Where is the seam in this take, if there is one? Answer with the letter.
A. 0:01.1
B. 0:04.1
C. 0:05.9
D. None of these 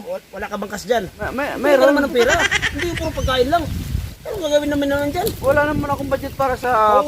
A